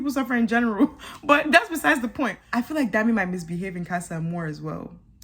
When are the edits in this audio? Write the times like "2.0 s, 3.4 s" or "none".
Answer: 2.4 s